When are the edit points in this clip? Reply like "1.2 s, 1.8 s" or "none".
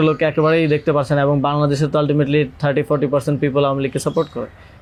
none